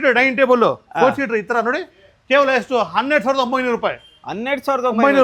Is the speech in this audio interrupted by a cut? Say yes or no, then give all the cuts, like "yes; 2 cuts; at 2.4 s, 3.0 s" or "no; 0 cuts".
no; 0 cuts